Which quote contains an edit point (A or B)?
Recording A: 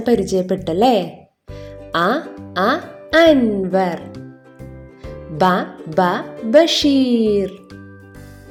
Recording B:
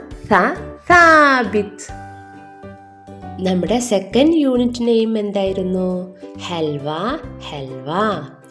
B